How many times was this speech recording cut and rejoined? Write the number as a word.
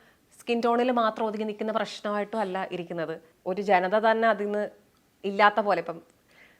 one